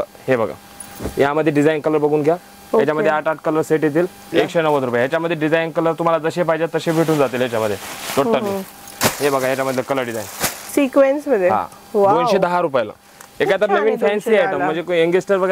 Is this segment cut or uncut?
cut